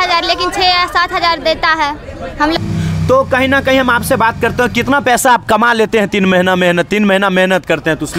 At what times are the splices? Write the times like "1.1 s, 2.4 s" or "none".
2.6 s